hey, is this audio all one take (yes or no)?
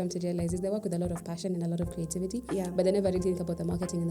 yes